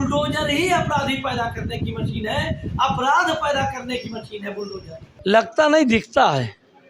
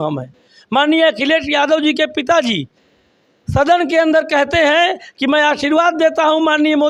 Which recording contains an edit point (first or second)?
first